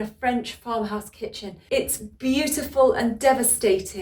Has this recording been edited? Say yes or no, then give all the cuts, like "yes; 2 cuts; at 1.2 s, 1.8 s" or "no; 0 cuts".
yes; 1 cut; at 1.5 s